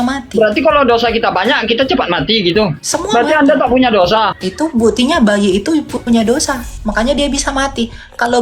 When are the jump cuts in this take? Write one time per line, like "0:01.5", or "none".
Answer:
0:02.8
0:04.4